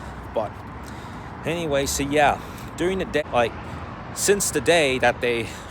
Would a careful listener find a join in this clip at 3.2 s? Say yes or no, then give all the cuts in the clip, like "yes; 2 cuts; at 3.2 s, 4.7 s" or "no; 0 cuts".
yes; 1 cut; at 3.2 s